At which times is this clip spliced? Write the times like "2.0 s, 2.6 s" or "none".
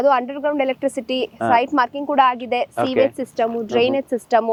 none